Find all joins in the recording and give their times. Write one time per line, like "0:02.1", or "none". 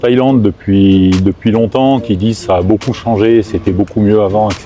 none